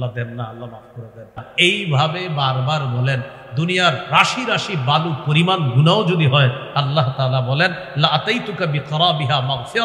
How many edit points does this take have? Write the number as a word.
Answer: one